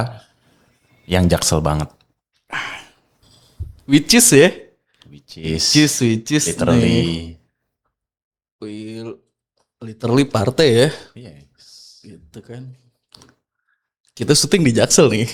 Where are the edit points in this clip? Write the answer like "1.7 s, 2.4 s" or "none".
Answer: none